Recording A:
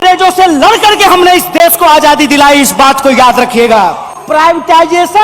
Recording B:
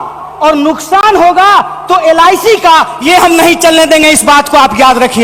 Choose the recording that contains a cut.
A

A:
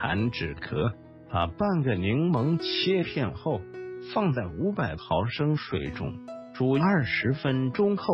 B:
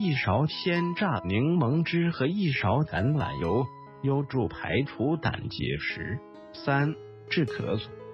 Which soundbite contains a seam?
A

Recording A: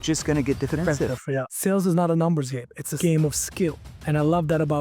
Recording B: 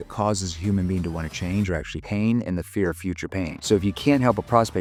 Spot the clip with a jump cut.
A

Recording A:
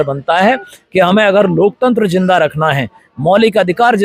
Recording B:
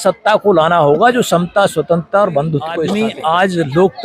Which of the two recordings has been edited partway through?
B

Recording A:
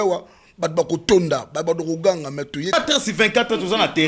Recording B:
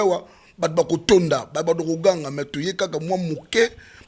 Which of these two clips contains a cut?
A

